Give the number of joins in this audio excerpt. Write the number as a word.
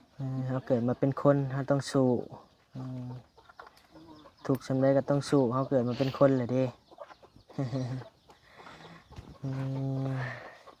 zero